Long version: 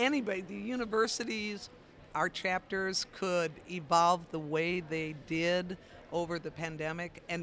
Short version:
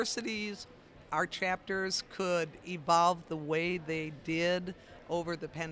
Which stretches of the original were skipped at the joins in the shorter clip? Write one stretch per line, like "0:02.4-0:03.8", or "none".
none